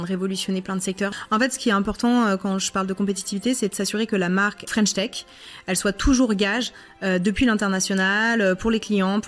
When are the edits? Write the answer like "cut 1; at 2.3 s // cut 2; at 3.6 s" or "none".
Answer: cut 1; at 1.1 s // cut 2; at 4.6 s